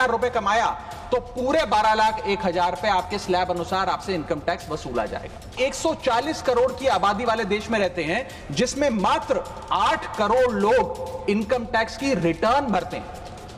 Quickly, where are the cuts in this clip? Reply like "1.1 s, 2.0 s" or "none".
5.5 s